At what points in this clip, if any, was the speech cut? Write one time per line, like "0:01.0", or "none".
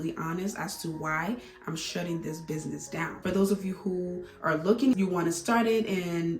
0:03.1
0:04.9